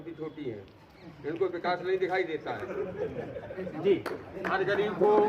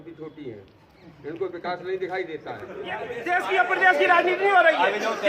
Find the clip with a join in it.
second; 1 cut; at 3.1 s

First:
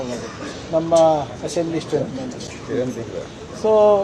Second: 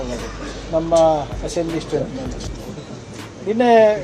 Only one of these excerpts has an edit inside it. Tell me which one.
second; 1 cut; at 2.5 s

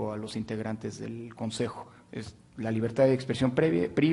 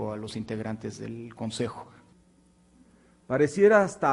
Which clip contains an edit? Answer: second; 1 cut; at 1.9 s

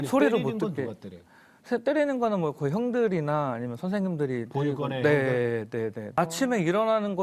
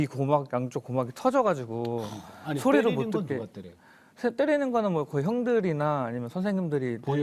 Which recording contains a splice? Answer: first; 1 cut; at 6.1 s

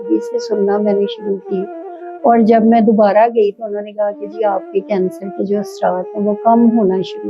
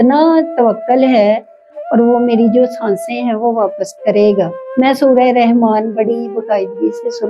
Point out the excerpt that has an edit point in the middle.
second; 1 cut; at 4.6 s

